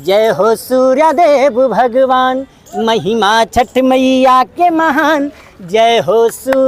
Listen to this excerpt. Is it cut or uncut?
uncut